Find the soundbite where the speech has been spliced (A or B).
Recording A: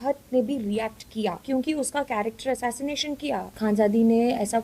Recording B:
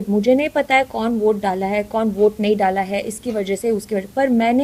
A